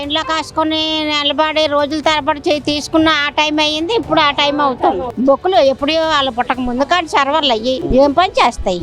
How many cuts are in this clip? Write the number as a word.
one